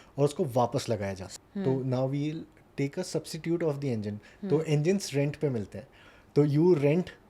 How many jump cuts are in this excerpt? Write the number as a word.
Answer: one